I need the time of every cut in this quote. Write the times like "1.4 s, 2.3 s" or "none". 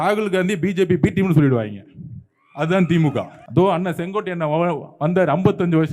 3.4 s

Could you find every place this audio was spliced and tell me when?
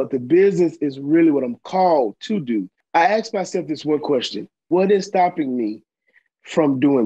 2.8 s, 4.6 s

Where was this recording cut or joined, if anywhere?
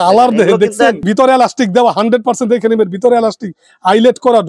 1.0 s

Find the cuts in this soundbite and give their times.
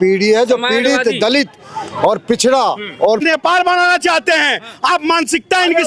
3.2 s

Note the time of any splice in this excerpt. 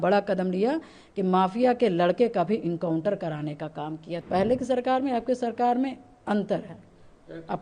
4.1 s

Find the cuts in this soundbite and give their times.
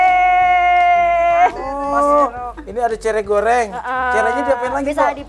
1.7 s

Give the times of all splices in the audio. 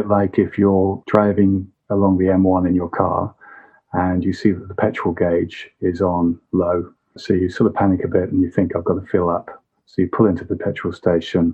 1.0 s, 7.1 s

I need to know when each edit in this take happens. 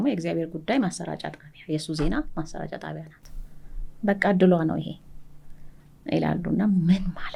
none

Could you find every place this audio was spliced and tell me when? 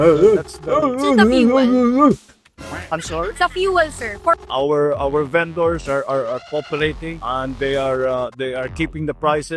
4.5 s

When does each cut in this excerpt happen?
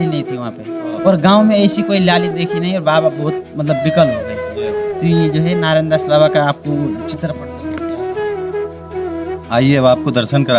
none

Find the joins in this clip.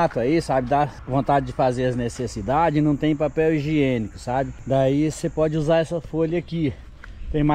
none

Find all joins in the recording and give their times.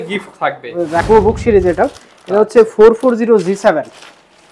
1.0 s

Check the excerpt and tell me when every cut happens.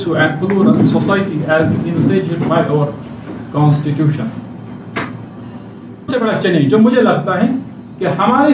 6.1 s

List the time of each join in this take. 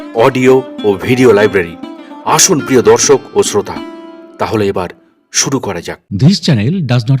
6.2 s

